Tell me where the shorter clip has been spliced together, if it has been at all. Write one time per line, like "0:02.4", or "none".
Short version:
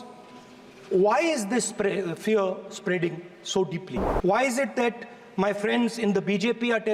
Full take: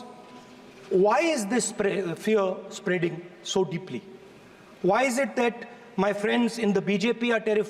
0:04.0

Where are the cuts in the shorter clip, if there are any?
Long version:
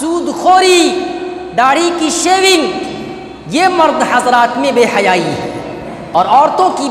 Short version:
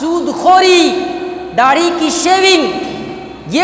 none

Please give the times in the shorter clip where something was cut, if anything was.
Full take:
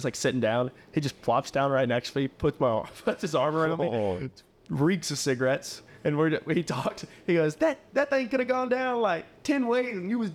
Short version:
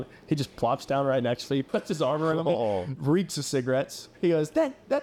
0:01.7
0:02.9
0:04.0

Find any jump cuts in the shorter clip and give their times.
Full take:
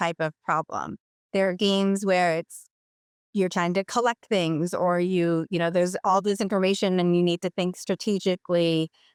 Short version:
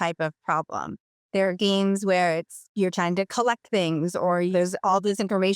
0:02.6
0:04.5

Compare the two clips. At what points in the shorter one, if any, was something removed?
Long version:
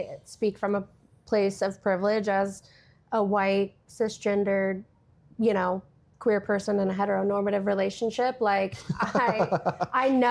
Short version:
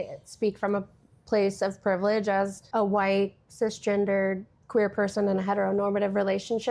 0:02.6
0:04.5

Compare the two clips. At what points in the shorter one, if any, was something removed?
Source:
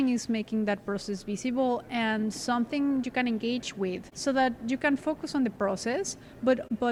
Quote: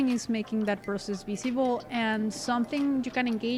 none

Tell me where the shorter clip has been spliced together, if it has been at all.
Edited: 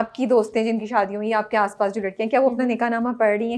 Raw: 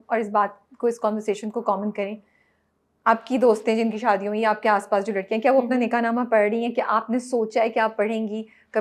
none

